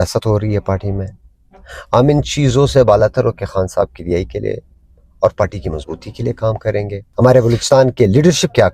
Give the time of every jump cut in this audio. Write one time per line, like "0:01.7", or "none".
0:07.0